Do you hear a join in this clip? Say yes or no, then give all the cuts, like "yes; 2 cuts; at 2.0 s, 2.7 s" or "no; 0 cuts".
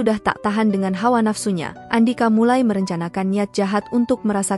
yes; 1 cut; at 1.7 s